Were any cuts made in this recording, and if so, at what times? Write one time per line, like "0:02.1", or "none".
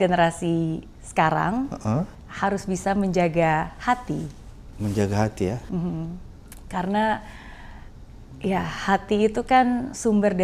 none